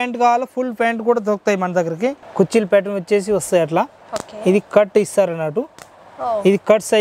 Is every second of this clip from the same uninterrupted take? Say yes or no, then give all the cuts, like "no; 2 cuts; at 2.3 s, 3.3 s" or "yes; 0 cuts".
no; 1 cut; at 2.2 s